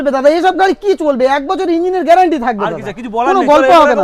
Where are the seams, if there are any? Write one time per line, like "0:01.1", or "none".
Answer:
none

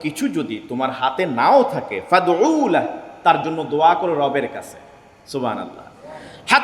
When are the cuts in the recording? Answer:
none

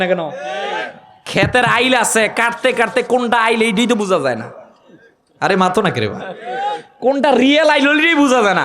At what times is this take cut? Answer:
none

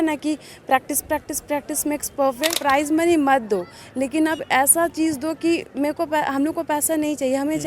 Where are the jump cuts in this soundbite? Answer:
0:02.6

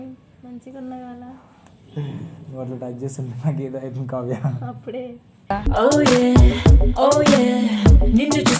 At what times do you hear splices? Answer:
none

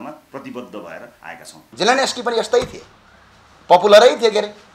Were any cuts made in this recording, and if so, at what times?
0:01.6

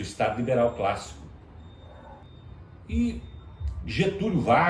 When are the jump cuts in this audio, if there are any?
0:02.2

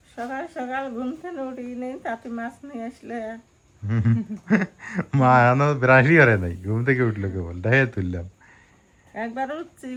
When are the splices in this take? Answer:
none

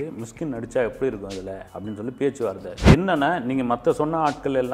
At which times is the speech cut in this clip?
0:02.9

